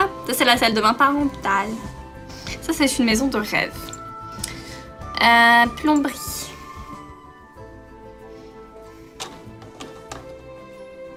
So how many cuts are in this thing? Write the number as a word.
zero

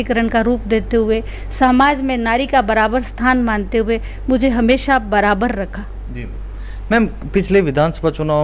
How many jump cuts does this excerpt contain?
zero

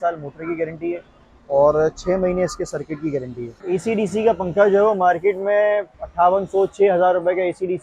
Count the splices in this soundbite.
two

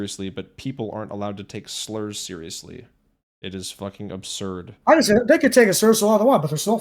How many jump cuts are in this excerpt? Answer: zero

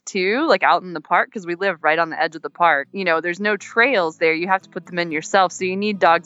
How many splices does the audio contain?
one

